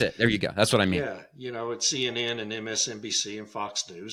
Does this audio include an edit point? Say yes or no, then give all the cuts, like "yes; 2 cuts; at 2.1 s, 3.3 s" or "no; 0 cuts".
no; 0 cuts